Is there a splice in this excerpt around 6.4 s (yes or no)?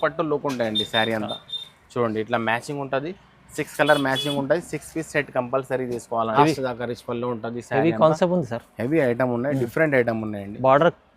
yes